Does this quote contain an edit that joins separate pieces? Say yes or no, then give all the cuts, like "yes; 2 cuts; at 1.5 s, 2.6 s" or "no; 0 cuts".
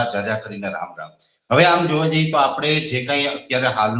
no; 0 cuts